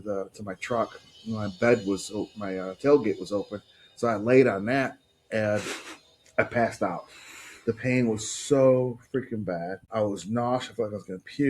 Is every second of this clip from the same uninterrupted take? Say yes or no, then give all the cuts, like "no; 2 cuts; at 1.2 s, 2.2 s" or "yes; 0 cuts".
no; 1 cut; at 9.8 s